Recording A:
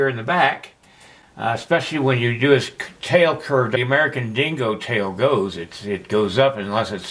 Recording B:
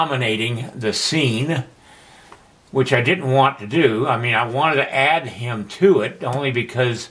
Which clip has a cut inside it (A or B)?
A